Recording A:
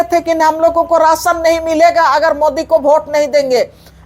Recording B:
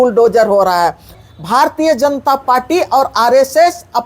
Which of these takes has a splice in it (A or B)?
B